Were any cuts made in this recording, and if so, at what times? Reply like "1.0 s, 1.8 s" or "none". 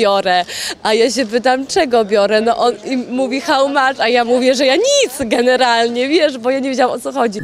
none